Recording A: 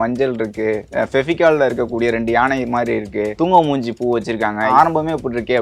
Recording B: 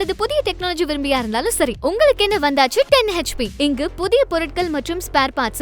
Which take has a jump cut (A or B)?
A